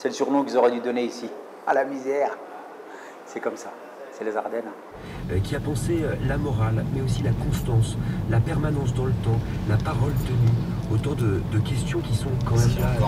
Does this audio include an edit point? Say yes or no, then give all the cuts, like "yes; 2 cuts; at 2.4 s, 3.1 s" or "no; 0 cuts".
no; 0 cuts